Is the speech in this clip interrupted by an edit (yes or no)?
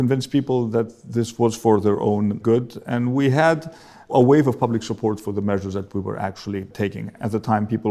yes